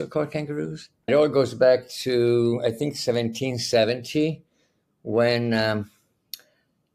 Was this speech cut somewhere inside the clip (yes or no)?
yes